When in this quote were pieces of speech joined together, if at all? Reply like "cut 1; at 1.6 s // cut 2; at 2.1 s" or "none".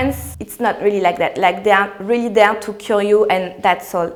none